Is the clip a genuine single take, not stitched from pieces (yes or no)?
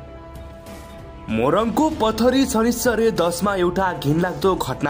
no